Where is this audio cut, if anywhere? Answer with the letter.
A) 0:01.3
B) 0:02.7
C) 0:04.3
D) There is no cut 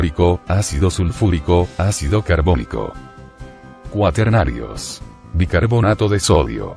C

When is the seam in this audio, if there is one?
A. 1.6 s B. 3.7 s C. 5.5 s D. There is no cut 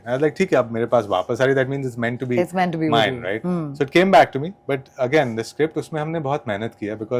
D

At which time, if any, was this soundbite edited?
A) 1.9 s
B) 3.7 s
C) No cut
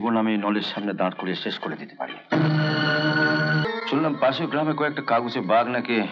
B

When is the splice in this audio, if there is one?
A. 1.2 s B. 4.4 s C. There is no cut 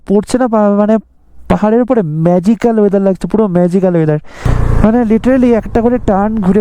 B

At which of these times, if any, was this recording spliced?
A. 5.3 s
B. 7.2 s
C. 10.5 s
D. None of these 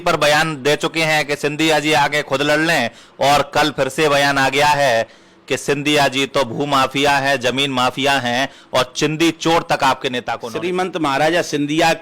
C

